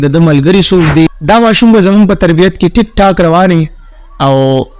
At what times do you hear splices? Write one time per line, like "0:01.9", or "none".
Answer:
0:01.1

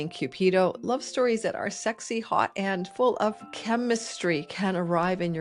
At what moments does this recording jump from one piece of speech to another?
none

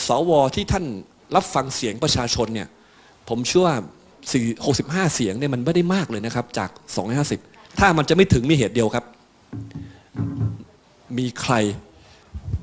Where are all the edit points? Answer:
0:01.1
0:04.1
0:07.6

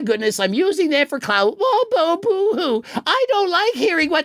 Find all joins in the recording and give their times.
none

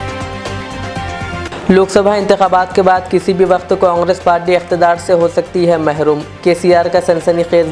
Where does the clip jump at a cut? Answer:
none

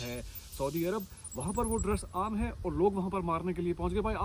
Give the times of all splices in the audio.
none

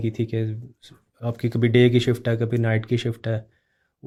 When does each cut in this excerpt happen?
none

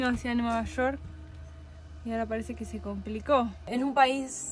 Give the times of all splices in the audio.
0:03.6

